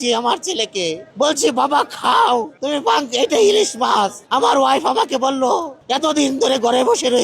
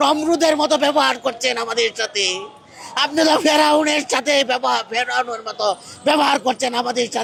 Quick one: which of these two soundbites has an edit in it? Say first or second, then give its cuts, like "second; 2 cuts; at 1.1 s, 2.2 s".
first; 4 cuts; at 1.0 s, 2.5 s, 4.2 s, 5.8 s